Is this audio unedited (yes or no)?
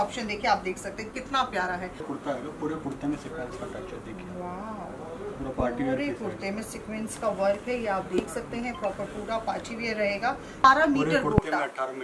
no